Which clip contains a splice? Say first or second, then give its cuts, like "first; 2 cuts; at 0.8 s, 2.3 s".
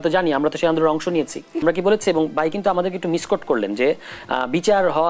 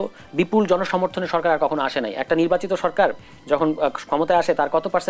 first; 1 cut; at 1.6 s